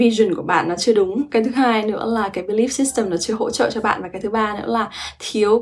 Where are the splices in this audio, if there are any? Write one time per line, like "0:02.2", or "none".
none